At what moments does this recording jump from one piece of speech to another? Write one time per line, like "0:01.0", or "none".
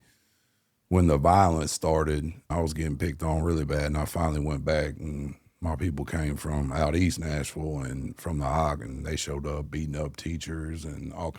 0:02.4